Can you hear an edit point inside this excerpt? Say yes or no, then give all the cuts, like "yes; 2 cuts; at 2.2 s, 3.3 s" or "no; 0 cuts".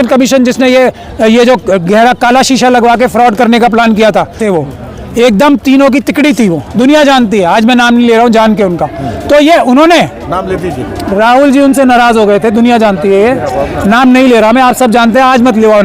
yes; 1 cut; at 4.4 s